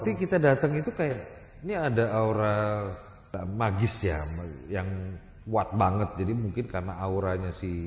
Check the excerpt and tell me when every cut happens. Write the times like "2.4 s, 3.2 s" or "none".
3.3 s